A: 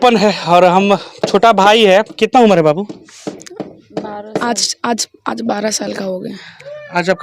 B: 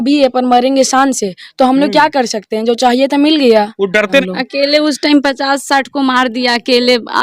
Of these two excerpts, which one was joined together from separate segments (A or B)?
B